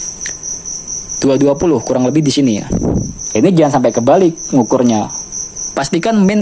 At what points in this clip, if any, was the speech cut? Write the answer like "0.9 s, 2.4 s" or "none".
3.2 s